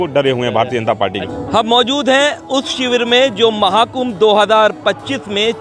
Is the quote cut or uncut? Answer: cut